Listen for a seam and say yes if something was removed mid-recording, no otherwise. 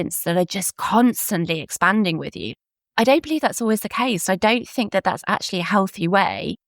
yes